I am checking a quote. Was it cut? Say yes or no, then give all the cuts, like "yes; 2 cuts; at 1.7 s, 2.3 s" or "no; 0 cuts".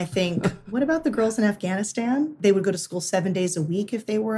yes; 1 cut; at 2.3 s